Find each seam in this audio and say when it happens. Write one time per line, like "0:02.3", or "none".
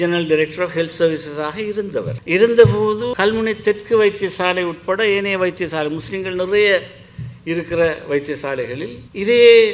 none